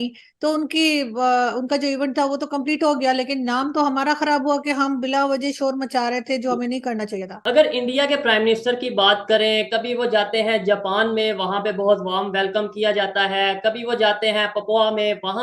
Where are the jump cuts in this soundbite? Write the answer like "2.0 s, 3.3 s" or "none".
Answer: 7.3 s